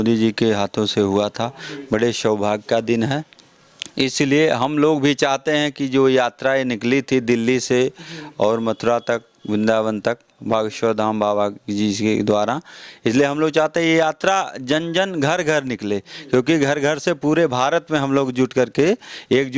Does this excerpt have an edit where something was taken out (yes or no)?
no